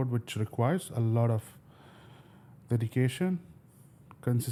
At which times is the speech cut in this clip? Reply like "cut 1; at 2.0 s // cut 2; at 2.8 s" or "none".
none